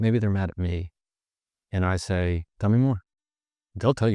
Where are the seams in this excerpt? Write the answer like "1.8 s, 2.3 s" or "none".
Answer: 2.5 s

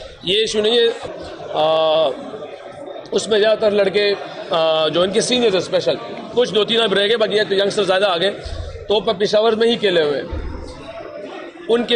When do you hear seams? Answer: 1.1 s

